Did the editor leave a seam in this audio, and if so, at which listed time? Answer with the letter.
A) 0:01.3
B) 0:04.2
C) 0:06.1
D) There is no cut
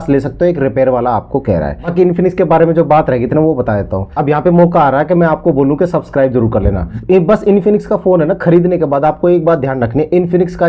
D